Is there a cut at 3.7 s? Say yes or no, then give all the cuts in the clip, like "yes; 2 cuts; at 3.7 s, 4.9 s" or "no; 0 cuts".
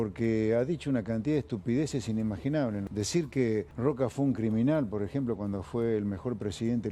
yes; 2 cuts; at 2.9 s, 3.7 s